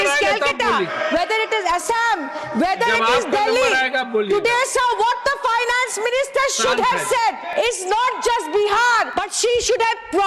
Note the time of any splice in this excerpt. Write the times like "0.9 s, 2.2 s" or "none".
7.4 s, 9.1 s